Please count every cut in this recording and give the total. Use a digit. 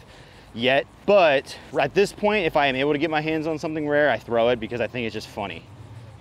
2